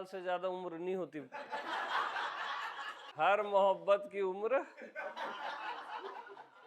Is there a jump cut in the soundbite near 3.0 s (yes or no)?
yes